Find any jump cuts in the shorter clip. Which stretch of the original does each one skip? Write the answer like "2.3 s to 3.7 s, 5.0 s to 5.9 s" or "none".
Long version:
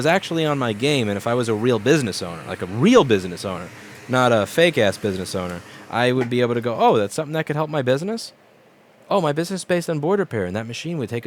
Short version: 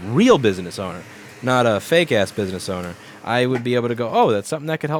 none